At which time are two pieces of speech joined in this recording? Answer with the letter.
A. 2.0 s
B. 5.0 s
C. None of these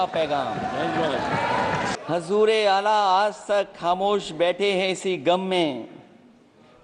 A